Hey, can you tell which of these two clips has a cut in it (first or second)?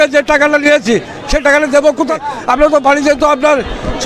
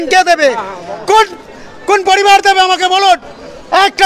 first